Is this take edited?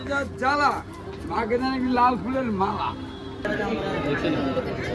yes; 1 cut; at 3.3 s

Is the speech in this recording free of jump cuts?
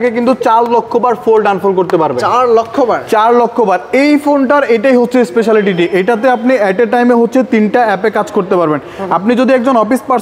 yes; 0 cuts

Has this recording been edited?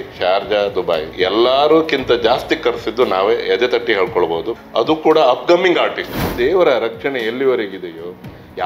yes; 1 cut; at 6.1 s

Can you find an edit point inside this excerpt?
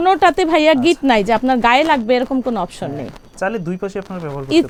no; 0 cuts

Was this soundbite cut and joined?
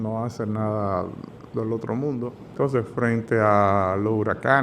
yes; 1 cut; at 2.4 s

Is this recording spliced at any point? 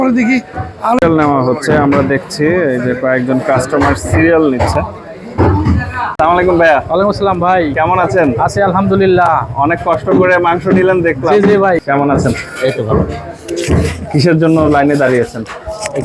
yes; 3 cuts; at 1.0 s, 6.1 s, 11.8 s

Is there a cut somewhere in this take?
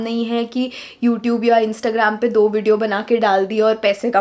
no; 0 cuts

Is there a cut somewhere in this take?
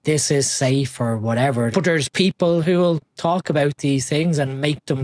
yes; 1 cut; at 1.7 s

